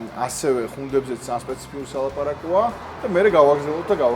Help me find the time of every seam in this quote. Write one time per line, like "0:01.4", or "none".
none